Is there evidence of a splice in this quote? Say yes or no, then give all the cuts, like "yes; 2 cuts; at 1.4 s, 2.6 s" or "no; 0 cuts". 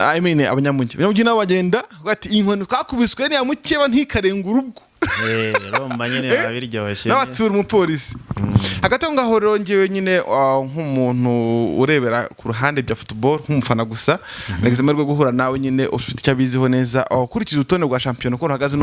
no; 0 cuts